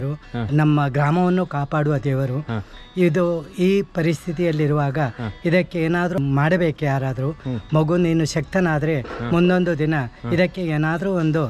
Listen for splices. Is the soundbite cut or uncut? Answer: cut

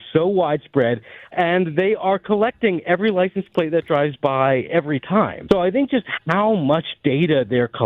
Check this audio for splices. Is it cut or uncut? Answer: cut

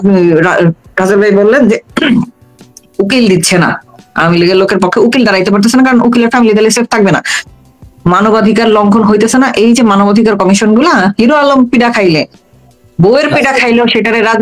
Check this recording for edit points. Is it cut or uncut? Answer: uncut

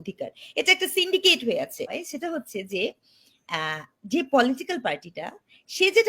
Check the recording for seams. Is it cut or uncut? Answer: cut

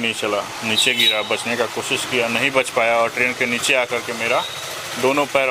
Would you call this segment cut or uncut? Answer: uncut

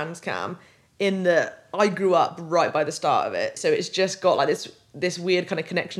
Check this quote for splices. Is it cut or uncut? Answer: cut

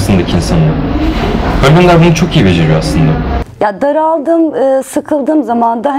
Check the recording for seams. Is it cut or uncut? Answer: cut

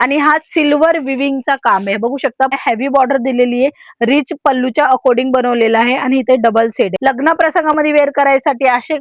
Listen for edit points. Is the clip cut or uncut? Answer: cut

